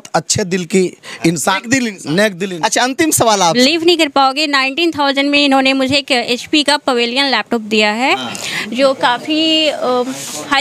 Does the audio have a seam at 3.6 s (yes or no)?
yes